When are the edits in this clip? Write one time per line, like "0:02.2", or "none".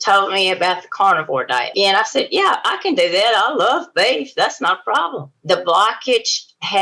0:01.7
0:05.3